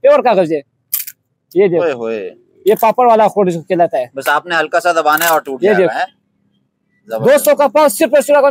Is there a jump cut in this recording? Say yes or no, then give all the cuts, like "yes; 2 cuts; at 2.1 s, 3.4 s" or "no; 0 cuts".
no; 0 cuts